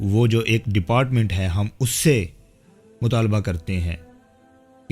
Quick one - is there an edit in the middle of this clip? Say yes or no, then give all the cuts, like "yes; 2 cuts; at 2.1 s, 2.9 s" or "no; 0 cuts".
no; 0 cuts